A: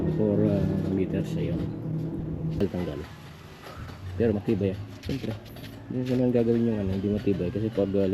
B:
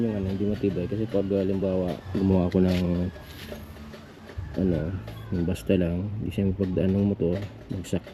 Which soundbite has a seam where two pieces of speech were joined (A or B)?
A